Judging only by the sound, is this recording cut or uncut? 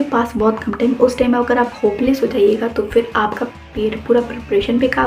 uncut